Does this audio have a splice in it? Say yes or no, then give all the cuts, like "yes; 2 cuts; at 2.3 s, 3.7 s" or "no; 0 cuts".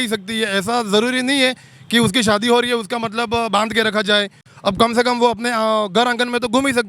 no; 0 cuts